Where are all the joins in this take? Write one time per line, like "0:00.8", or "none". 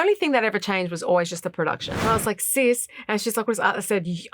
0:01.9